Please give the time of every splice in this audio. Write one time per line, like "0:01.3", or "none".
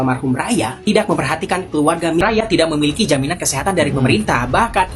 0:02.2